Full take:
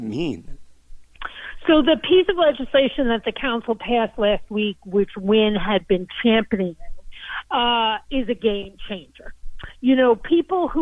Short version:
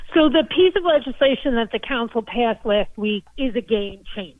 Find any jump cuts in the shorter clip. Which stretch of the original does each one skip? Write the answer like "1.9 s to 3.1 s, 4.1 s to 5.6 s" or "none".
4.8 s to 8.0 s